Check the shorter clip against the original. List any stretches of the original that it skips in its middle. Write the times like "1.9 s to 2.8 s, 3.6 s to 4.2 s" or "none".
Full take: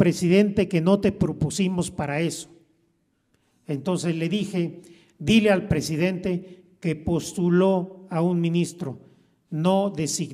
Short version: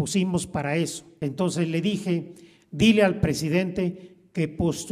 2.5 s to 3.5 s